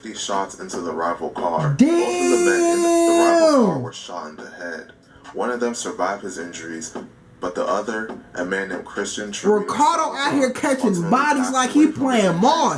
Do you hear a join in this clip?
no; 0 cuts

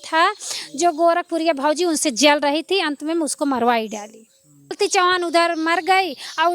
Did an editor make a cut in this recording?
yes; 1 cut; at 4.8 s

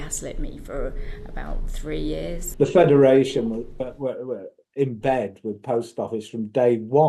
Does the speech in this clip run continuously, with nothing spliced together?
no; 1 cut; at 2.4 s

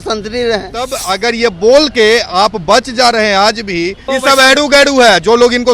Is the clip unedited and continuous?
no; 2 cuts; at 1.0 s, 4.0 s

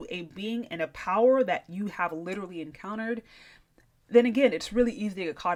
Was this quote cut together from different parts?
no; 0 cuts

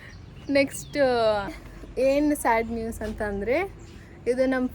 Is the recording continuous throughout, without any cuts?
no; 1 cut; at 1.6 s

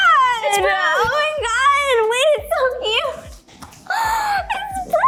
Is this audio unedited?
yes; 0 cuts

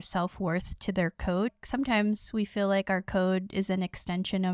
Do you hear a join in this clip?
yes; 1 cut; at 1.6 s

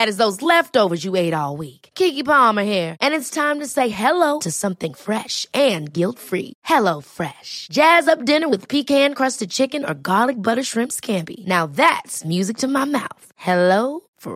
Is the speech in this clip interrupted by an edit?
no; 0 cuts

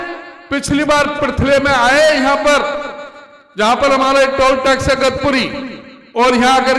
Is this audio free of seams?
yes; 0 cuts

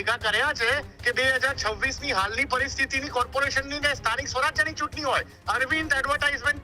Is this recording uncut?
no; 2 cuts; at 0.9 s, 5.3 s

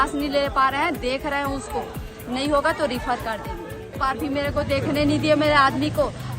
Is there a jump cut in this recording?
yes; 1 cut; at 3.9 s

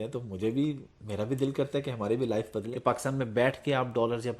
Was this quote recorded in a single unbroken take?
no; 1 cut; at 2.7 s

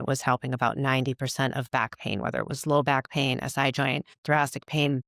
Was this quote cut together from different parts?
no; 0 cuts

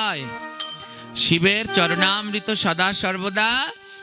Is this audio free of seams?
yes; 0 cuts

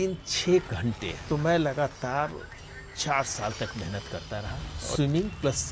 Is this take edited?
yes; 2 cuts; at 1.1 s, 5.0 s

